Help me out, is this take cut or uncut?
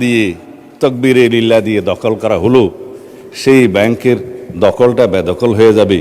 uncut